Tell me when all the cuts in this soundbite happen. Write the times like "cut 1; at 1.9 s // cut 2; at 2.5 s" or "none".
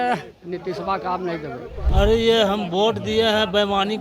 cut 1; at 1.8 s